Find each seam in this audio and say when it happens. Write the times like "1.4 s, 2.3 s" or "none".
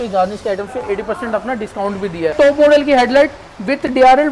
2.3 s